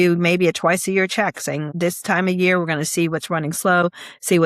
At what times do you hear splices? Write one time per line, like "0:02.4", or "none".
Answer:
0:01.7